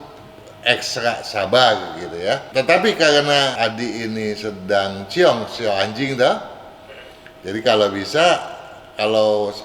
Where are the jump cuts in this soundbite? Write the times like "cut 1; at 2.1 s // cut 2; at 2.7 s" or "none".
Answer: cut 1; at 2.5 s // cut 2; at 3.6 s